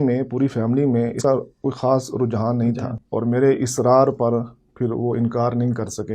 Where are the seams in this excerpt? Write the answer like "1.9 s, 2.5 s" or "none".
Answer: 1.2 s, 3.0 s